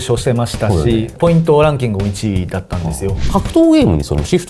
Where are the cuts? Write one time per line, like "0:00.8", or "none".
0:01.1
0:03.2